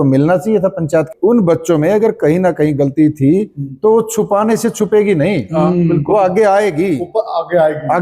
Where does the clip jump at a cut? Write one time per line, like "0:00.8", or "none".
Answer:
0:01.1